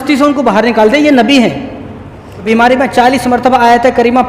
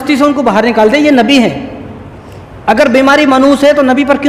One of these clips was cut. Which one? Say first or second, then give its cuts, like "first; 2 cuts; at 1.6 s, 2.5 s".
first; 1 cut; at 2.4 s